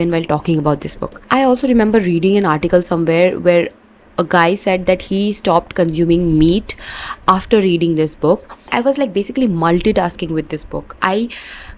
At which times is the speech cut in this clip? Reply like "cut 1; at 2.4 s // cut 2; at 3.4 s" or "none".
cut 1; at 1.2 s // cut 2; at 8.6 s